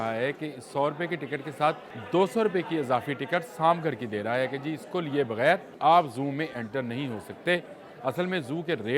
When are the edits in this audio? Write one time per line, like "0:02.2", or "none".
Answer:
0:01.9
0:05.7